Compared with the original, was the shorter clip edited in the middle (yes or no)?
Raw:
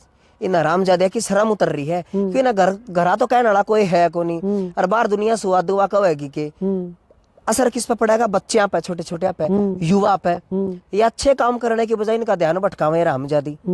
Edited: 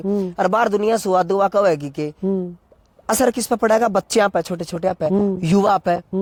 no